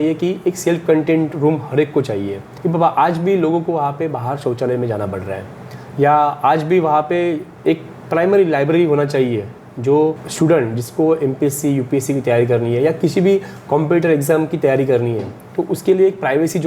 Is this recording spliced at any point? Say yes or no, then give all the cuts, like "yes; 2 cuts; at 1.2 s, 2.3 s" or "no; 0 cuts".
yes; 3 cuts; at 2.4 s, 7.5 s, 10.3 s